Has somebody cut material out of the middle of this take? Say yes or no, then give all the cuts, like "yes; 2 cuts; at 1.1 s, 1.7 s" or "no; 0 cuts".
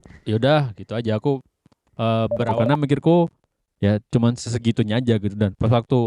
yes; 1 cut; at 2.5 s